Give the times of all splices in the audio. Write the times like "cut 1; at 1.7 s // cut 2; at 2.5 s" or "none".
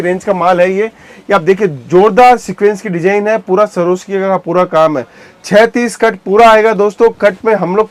none

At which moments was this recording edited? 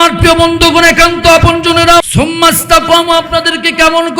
cut 1; at 2.0 s

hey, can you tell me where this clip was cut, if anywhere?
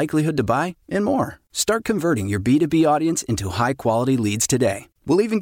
none

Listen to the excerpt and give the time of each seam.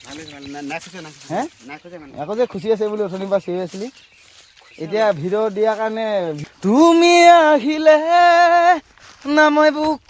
cut 1; at 6.4 s

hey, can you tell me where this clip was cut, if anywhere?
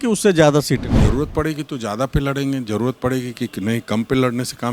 cut 1; at 0.9 s

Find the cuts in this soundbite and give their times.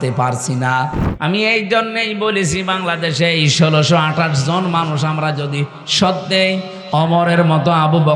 cut 1; at 1.0 s

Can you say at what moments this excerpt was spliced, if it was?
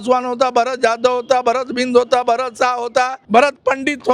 cut 1; at 3.2 s

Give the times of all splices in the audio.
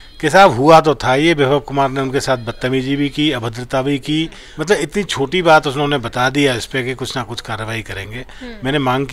cut 1; at 4.5 s

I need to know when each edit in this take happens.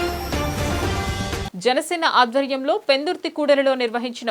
cut 1; at 1.4 s

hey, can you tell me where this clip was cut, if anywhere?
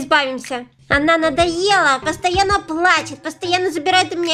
none

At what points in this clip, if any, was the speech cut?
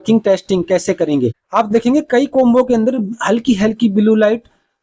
cut 1; at 1.4 s

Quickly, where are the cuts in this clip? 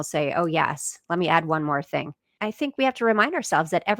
cut 1; at 2.3 s

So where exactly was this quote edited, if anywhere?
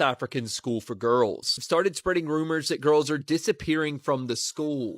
cut 1; at 1.6 s

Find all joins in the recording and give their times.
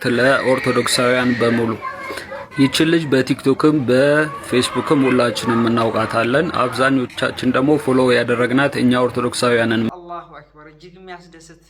cut 1; at 9.9 s

